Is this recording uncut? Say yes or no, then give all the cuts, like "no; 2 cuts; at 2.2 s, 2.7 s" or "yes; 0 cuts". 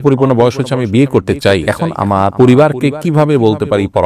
no; 1 cut; at 2.2 s